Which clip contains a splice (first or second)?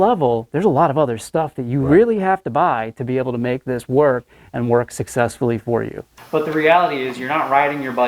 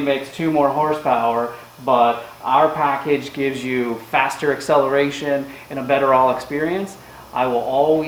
first